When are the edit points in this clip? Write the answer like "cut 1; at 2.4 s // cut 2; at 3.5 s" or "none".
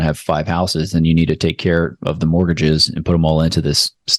none